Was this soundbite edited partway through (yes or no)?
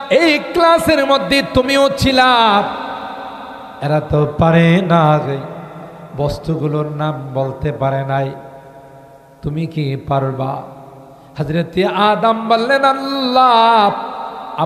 no